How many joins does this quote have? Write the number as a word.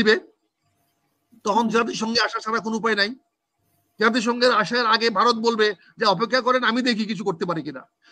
zero